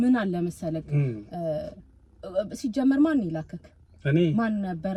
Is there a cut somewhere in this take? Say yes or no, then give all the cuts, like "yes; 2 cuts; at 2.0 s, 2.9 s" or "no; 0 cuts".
no; 0 cuts